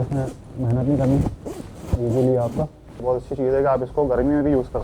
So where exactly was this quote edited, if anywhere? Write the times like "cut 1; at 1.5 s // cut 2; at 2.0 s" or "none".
cut 1; at 2.8 s